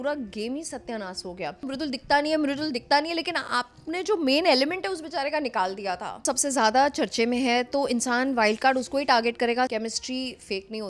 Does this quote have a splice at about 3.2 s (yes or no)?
no